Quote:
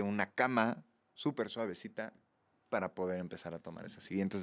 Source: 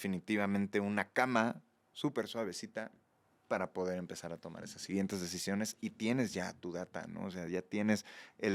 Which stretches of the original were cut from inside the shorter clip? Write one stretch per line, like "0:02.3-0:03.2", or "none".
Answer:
none